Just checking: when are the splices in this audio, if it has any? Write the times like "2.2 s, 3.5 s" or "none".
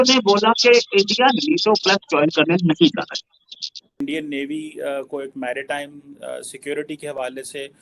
4.0 s